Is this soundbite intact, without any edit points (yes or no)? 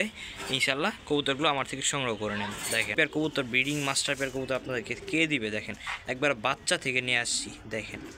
no